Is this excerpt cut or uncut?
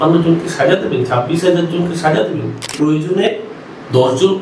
cut